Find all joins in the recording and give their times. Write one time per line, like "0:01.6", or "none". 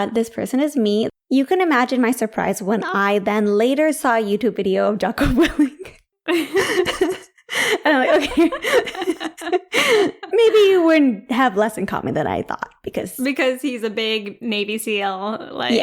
0:01.1